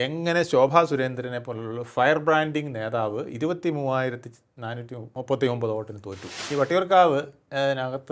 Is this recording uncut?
no; 2 cuts; at 5.1 s, 6.4 s

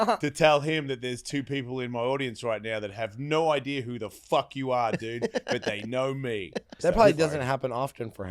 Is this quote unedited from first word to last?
no; 1 cut; at 6.7 s

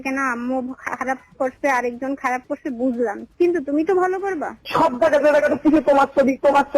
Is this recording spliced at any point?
yes; 1 cut; at 4.7 s

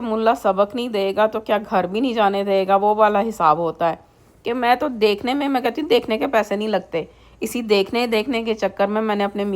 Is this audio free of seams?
yes; 0 cuts

